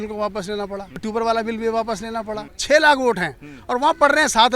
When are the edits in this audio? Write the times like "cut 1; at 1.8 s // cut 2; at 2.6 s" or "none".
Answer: cut 1; at 1.0 s // cut 2; at 2.6 s